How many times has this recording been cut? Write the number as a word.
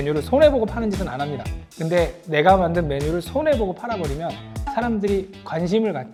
zero